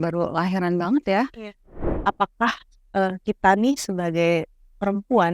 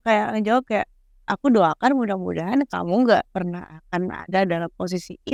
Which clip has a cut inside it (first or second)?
first